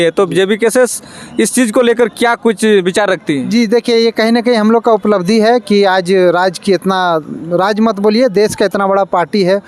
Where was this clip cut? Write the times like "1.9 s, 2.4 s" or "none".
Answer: none